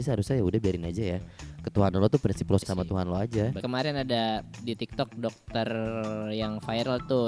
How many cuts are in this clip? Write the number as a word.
two